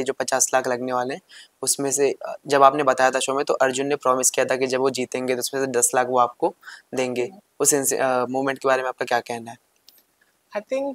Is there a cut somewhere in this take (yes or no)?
no